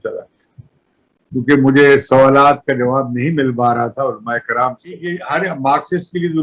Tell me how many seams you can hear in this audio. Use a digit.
1